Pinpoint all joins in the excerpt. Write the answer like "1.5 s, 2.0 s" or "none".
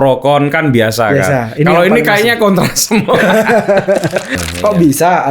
4.4 s